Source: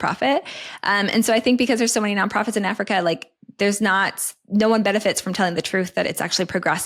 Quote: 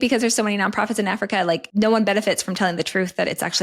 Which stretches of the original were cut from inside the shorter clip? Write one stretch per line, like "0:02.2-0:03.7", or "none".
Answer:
0:03.2-0:04.4